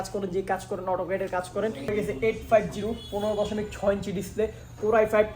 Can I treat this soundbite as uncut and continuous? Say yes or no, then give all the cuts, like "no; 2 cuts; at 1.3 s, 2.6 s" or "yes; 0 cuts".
no; 1 cut; at 1.9 s